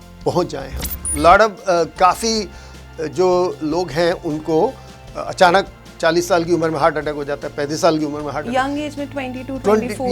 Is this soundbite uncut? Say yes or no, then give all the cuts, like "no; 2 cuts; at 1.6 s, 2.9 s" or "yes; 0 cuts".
no; 1 cut; at 1.0 s